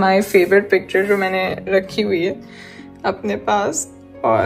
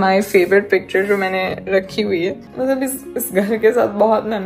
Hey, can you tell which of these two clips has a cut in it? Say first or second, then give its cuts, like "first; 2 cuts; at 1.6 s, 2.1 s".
second; 1 cut; at 2.4 s